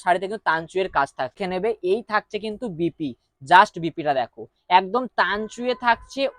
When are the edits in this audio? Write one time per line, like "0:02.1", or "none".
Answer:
0:01.4

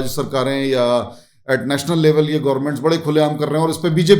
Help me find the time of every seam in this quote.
none

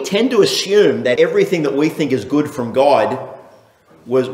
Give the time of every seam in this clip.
0:01.1

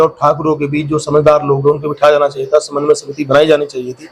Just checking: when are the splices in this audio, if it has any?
none

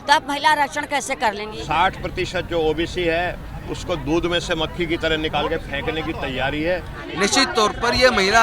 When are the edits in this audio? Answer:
0:01.5
0:07.0

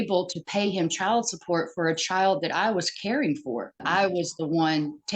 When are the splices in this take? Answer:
0:03.8

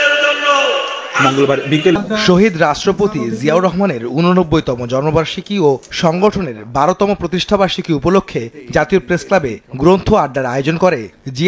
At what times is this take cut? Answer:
0:01.9

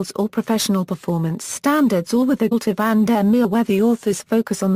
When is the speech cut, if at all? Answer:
none

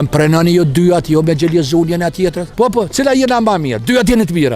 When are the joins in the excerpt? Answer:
0:02.4

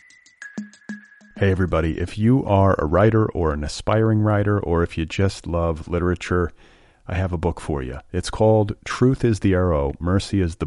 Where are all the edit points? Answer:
0:00.9

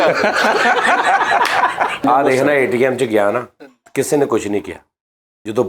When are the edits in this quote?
0:02.0

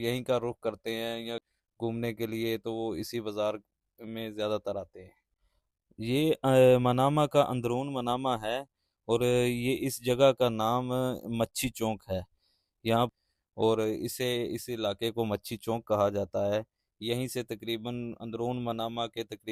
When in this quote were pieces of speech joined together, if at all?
0:01.6
0:13.1

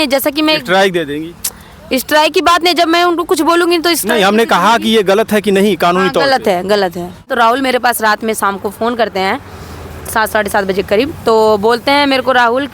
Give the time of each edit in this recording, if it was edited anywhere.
0:07.3

